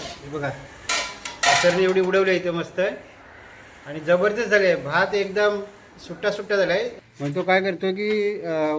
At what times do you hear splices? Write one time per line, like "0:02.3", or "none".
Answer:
0:07.0

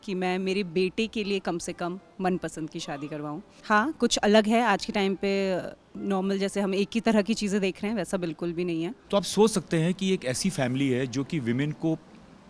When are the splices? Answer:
0:03.5
0:09.0

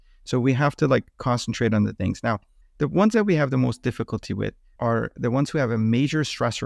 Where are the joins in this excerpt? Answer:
0:02.5
0:04.6

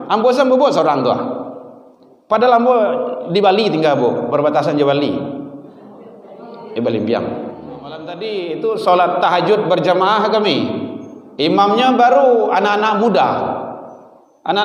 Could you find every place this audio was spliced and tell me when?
0:08.2

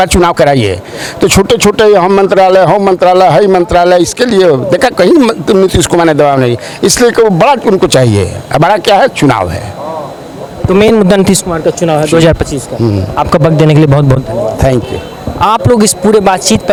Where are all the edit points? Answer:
none

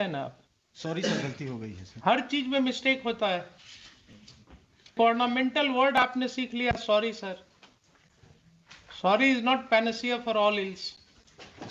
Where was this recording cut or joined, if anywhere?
0:04.9

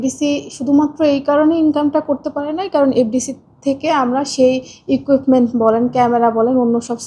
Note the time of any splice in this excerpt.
none

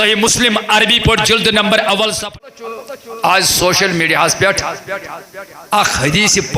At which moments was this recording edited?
0:02.4

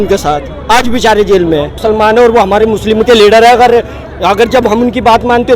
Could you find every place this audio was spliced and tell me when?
0:01.8

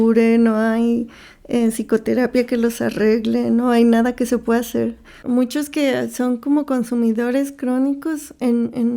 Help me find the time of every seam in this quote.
0:05.1

